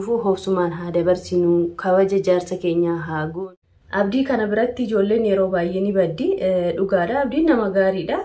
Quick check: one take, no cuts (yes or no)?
no